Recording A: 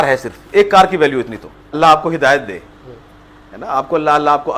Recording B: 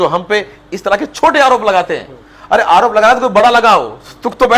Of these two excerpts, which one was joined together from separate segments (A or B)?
A